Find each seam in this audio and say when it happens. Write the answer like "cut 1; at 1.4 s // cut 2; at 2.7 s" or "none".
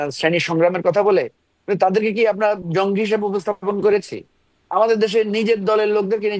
none